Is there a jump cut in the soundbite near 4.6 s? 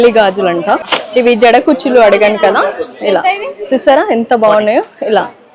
no; 1 cut; at 1.0 s

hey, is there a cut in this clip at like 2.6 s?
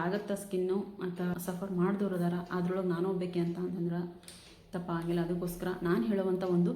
no; 1 cut; at 1.4 s

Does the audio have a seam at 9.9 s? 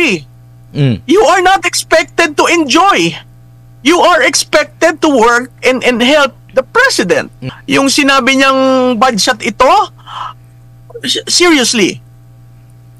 no; 1 cut; at 7.5 s

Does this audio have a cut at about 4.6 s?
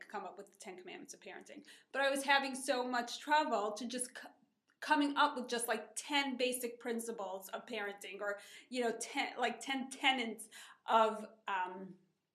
no; 1 cut; at 7.6 s

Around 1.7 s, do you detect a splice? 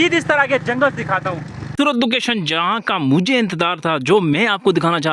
yes; 1 cut; at 1.7 s

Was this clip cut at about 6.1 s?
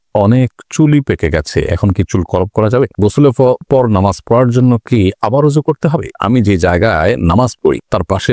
yes; 2 cuts; at 3.0 s, 6.1 s

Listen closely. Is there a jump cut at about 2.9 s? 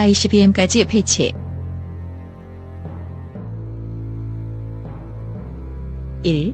no; 2 cuts; at 1.3 s, 5.7 s

